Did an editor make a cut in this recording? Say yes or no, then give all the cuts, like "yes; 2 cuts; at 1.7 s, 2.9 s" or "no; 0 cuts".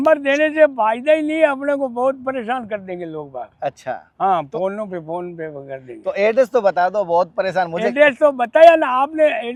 no; 0 cuts